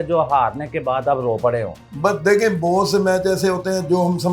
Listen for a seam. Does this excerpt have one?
no; 0 cuts

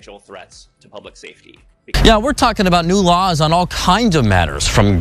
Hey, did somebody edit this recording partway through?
yes; 1 cut; at 1.8 s

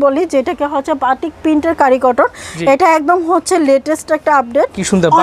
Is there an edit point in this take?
no; 0 cuts

